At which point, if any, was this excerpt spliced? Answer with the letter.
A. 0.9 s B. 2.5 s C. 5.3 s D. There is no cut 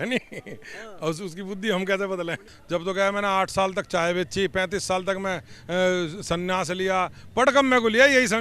B